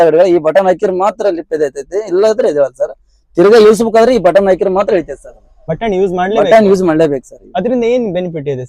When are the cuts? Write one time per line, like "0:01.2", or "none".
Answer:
0:05.6